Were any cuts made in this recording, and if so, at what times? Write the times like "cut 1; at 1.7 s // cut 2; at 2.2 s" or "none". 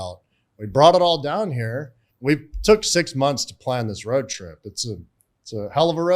cut 1; at 2.0 s

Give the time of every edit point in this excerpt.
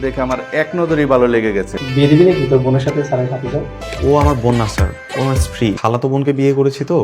cut 1; at 1.8 s // cut 2; at 3.8 s // cut 3; at 5.8 s

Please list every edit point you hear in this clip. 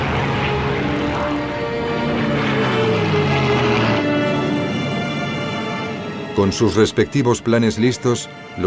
cut 1; at 6.0 s

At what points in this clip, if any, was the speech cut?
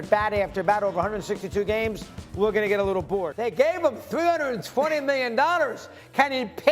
cut 1; at 3.3 s

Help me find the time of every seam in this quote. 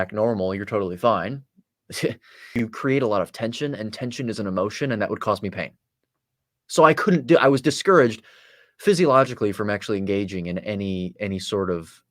cut 1; at 2.5 s

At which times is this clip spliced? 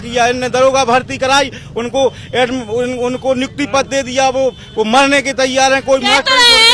none

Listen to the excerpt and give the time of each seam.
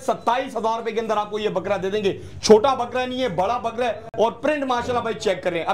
none

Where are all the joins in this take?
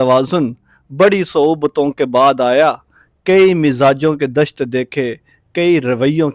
none

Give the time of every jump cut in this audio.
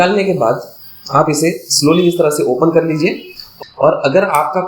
cut 1; at 3.5 s

